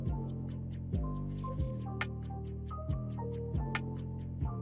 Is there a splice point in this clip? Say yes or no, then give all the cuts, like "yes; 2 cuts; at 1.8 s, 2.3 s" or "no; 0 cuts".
no; 0 cuts